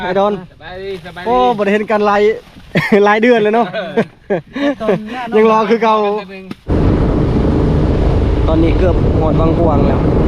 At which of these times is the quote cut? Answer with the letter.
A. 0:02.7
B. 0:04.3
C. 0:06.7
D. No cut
C